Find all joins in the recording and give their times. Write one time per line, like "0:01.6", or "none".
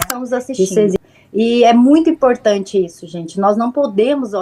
0:01.0